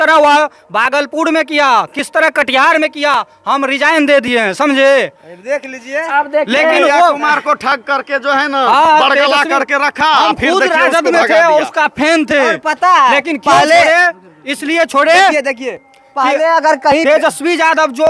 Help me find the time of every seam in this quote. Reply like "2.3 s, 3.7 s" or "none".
none